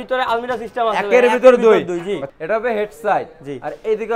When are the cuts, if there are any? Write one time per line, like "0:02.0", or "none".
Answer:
0:02.3